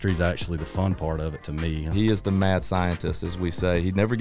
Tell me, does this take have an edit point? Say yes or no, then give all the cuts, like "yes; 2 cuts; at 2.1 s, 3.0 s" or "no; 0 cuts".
yes; 1 cut; at 1.9 s